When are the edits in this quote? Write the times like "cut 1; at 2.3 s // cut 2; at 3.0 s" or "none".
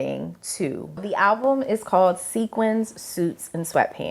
cut 1; at 1.0 s